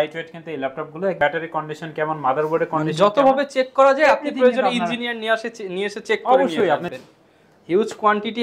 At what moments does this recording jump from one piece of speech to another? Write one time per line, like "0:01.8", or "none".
0:01.2
0:06.9